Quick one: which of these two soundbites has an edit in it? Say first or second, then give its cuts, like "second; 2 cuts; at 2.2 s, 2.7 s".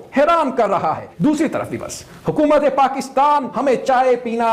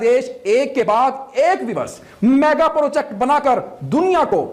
first; 2 cuts; at 1.1 s, 3.5 s